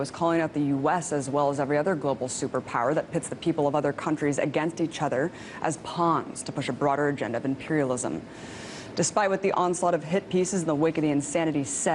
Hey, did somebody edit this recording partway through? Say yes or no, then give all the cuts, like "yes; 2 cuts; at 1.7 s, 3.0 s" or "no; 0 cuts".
no; 0 cuts